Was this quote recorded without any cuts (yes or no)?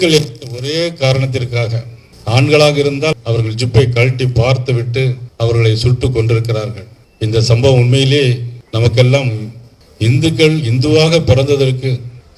yes